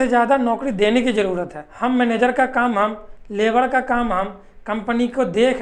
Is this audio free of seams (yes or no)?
no